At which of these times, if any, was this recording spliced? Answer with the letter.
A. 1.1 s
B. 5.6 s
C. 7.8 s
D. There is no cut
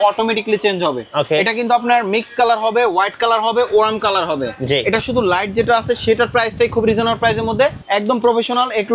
C